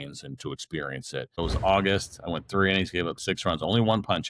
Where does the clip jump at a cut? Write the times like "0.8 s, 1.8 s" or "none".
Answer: 1.4 s